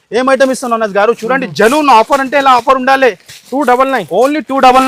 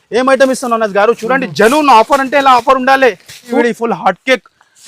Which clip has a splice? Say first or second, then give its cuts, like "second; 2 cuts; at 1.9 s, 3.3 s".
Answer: second; 1 cut; at 3.5 s